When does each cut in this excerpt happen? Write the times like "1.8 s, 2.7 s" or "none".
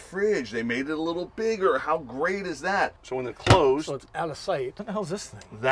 3.0 s, 4.8 s